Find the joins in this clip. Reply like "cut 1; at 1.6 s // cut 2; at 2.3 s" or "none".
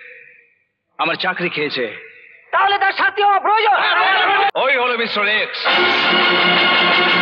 cut 1; at 4.5 s